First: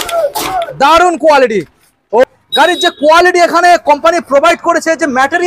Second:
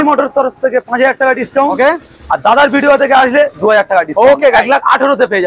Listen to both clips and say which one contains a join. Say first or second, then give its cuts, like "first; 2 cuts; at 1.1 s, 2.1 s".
first; 1 cut; at 2.2 s